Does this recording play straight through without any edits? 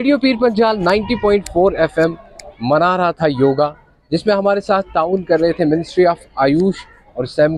yes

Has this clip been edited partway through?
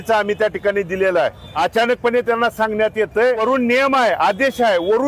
yes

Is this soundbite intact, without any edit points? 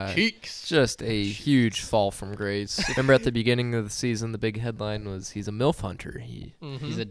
no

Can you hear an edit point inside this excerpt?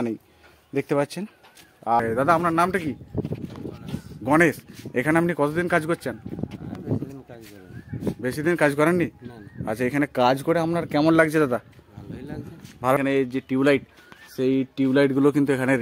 yes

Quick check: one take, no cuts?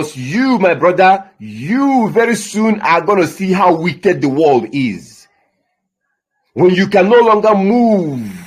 yes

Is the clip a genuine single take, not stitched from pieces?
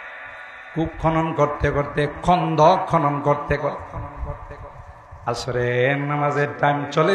yes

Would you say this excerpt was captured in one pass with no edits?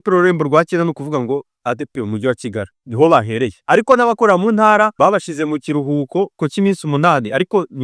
no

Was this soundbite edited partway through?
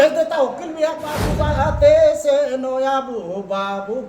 yes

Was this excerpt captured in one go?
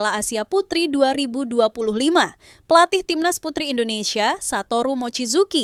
yes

